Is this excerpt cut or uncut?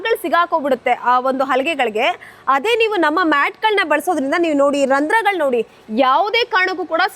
uncut